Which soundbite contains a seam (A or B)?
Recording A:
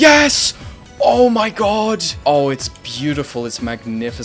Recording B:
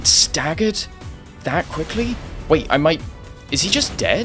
A